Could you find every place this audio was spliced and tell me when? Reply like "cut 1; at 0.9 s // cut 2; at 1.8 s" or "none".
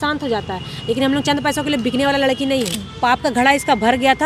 cut 1; at 2.8 s